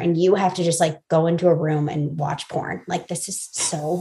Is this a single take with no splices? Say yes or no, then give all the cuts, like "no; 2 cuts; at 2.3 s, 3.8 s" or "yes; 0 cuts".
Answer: yes; 0 cuts